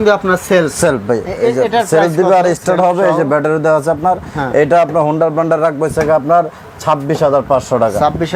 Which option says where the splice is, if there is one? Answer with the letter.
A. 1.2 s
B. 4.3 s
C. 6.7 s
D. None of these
D